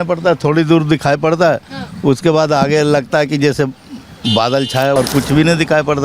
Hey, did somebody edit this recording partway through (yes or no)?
yes